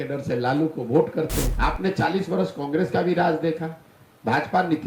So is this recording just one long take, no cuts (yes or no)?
no